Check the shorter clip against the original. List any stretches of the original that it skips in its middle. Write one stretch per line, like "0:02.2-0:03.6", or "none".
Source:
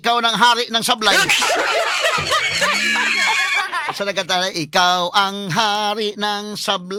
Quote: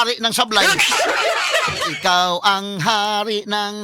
0:02.4-0:04.6